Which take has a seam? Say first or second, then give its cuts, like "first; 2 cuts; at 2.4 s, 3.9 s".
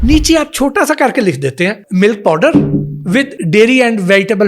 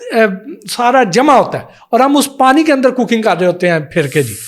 first; 2 cuts; at 1.8 s, 3.4 s